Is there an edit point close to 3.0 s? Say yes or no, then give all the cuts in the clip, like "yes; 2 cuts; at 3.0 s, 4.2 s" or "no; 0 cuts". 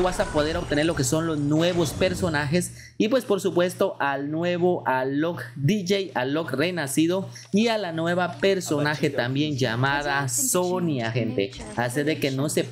no; 0 cuts